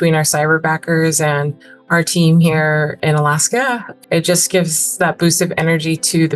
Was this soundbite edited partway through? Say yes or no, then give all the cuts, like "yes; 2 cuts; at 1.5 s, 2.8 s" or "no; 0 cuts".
yes; 2 cuts; at 3.0 s, 3.9 s